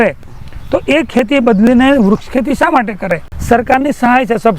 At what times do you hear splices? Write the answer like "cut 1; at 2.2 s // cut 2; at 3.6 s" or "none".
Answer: cut 1; at 3.3 s